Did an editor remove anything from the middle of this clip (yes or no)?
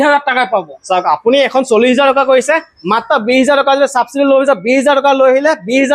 no